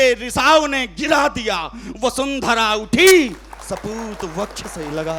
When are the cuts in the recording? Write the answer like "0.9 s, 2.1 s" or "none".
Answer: none